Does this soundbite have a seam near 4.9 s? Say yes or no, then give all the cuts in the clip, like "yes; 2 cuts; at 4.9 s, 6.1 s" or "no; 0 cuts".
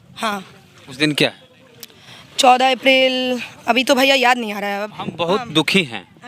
yes; 1 cut; at 4.9 s